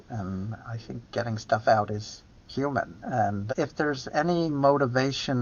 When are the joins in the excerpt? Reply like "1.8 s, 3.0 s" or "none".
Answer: 3.5 s